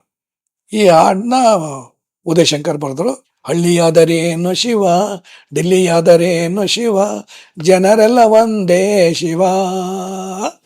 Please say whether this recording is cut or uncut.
cut